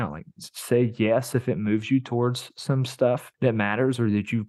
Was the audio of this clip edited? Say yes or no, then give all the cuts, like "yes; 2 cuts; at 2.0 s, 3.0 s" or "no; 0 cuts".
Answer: yes; 1 cut; at 3.3 s